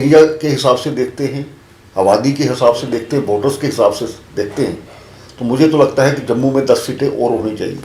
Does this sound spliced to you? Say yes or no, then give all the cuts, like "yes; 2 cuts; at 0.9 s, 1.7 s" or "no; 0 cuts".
no; 0 cuts